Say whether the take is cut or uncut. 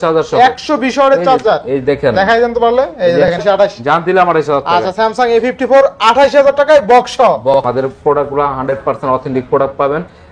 cut